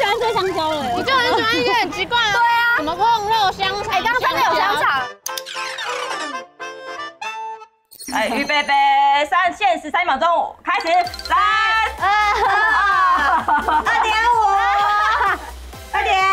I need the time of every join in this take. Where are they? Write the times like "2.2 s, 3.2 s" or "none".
none